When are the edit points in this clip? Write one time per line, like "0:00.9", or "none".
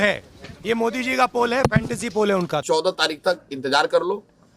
0:02.6